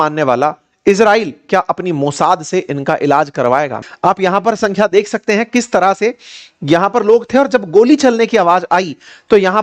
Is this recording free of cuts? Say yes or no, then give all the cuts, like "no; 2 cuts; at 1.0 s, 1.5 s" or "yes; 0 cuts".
no; 1 cut; at 3.8 s